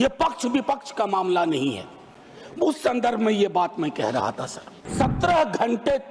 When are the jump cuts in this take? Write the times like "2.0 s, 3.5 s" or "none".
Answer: 4.9 s